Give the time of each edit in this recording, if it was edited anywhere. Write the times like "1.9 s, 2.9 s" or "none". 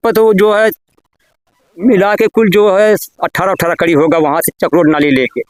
none